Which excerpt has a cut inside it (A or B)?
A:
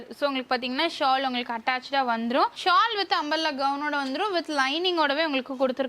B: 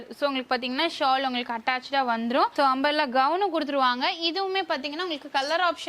A